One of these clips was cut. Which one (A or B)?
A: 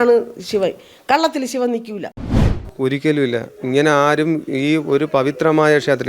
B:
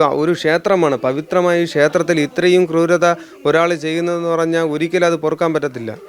A